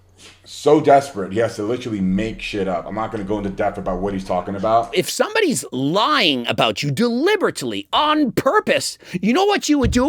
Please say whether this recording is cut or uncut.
cut